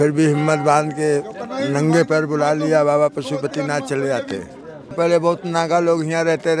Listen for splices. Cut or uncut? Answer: cut